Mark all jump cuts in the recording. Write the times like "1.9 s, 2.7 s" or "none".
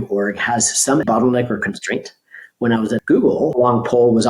3.0 s